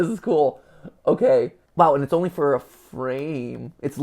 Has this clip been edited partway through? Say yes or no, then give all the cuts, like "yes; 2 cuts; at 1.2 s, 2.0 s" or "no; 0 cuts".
yes; 1 cut; at 1.6 s